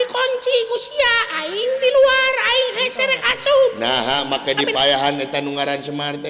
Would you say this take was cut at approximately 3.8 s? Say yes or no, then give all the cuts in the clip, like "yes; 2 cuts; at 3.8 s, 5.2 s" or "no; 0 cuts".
yes; 1 cut; at 3.8 s